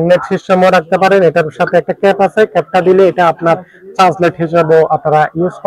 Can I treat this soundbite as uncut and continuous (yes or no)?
yes